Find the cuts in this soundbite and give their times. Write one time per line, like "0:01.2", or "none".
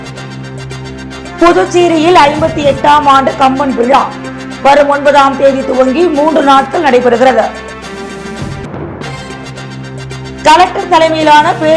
0:00.9